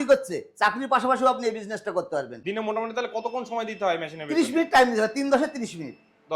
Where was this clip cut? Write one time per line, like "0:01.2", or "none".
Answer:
0:02.3